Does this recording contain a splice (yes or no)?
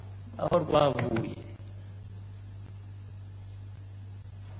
no